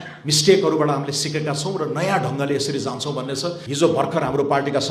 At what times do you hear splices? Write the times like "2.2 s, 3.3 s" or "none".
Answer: 3.6 s